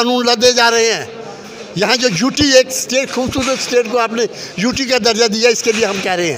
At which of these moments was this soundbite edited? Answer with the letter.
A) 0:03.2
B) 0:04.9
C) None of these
C